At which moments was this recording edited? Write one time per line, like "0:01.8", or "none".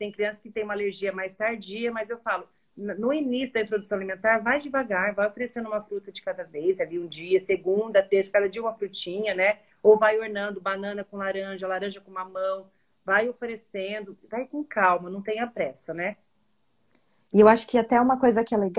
none

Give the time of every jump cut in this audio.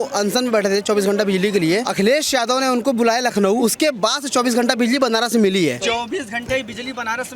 0:01.9
0:03.6
0:05.8

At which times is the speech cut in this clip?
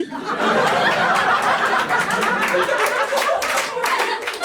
0:03.1

